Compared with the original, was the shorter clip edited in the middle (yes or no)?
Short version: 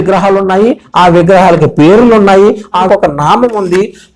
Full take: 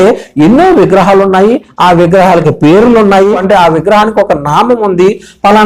yes